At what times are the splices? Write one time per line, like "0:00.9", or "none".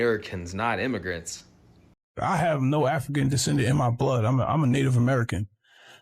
0:02.1